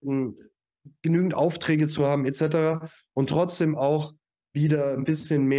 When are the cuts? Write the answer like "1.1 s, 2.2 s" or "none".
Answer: none

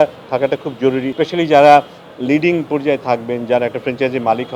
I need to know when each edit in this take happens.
1.1 s

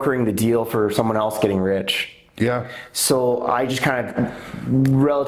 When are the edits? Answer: none

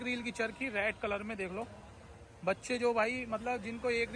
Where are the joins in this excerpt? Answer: none

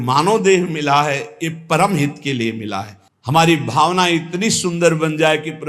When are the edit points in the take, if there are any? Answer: 3.0 s

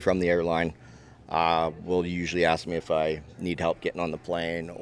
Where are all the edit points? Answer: none

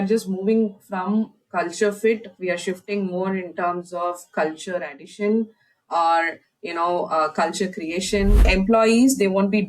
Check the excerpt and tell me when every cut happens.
8.5 s

